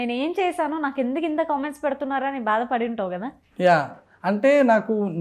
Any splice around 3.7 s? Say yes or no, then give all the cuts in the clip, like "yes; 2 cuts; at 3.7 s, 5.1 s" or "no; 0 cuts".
no; 0 cuts